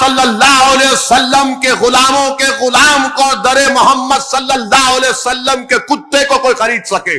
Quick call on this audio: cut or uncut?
uncut